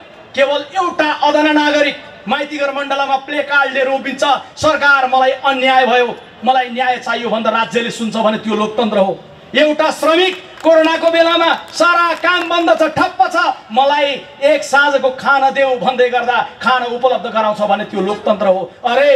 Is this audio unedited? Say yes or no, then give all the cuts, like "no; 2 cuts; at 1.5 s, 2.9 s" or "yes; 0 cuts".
yes; 0 cuts